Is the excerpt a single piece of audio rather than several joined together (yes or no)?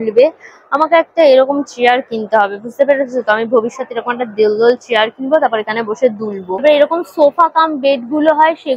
yes